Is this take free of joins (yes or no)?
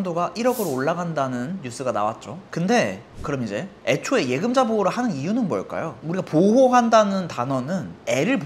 yes